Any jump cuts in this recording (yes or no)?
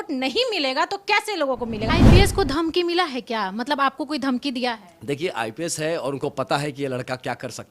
yes